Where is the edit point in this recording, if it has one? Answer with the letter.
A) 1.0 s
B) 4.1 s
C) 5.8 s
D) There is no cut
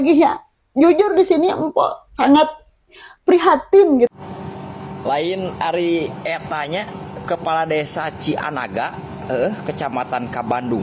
B